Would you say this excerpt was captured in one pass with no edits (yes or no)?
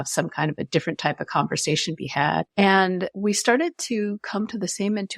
no